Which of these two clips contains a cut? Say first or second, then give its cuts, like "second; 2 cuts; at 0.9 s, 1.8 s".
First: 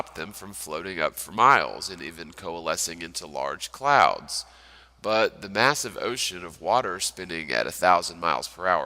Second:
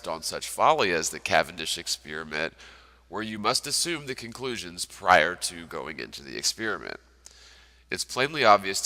first; 1 cut; at 7.2 s